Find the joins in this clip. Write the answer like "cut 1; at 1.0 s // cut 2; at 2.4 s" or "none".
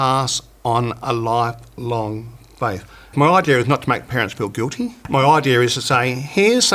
cut 1; at 3.1 s // cut 2; at 5.0 s